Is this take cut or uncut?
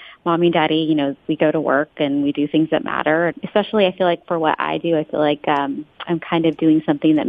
cut